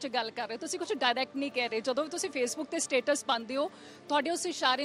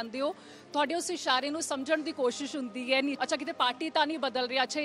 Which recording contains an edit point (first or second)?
second